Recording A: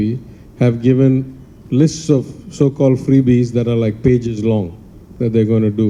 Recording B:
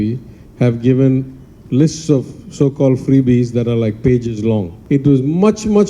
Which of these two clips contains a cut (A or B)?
B